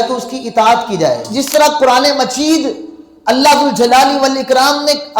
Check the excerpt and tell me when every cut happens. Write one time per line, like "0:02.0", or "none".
0:01.5